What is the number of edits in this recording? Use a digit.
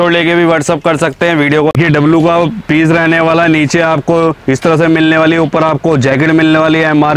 1